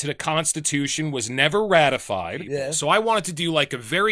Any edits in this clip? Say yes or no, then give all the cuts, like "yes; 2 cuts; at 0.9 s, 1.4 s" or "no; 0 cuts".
yes; 1 cut; at 2.7 s